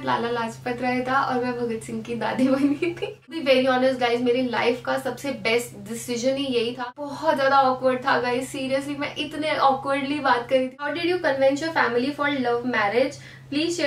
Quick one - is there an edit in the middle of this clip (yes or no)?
yes